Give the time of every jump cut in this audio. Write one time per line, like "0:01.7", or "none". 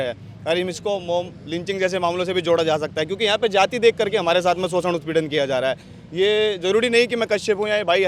none